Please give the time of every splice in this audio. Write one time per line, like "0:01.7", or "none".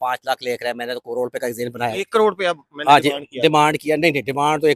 none